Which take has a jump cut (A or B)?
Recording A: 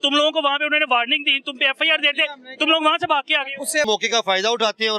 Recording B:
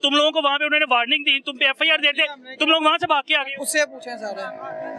A